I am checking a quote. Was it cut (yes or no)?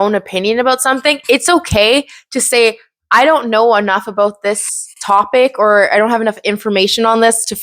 no